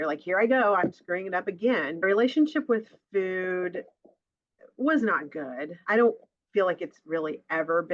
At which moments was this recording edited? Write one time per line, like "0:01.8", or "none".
0:02.0
0:05.8